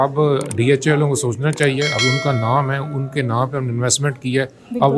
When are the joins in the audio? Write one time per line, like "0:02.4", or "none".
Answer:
none